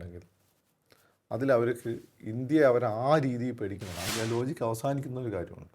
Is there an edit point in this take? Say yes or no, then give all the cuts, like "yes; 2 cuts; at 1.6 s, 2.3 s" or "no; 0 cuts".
yes; 1 cut; at 4.0 s